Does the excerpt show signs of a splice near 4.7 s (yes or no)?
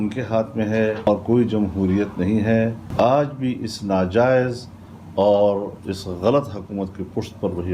no